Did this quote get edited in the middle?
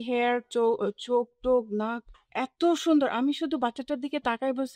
no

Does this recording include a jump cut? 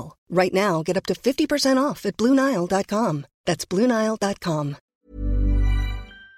yes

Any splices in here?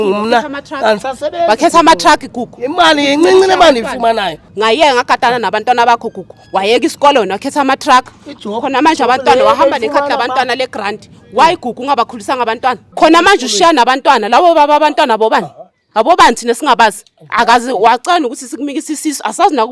yes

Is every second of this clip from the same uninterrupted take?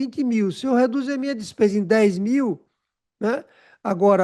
yes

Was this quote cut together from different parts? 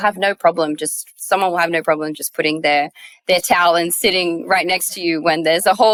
no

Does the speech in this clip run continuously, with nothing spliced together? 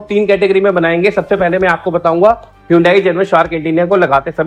yes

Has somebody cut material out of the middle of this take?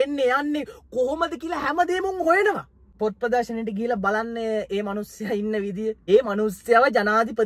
yes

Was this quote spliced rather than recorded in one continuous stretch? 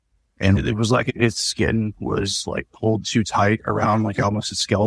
no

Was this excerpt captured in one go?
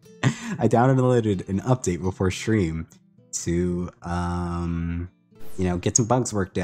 yes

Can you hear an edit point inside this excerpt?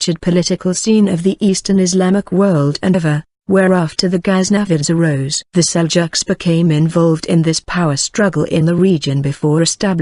no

